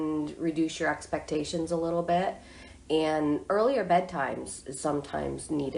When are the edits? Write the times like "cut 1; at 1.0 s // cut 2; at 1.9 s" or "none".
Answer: none